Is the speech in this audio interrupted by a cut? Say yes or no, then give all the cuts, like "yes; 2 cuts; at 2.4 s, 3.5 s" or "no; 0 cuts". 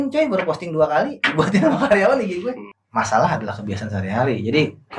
yes; 1 cut; at 2.7 s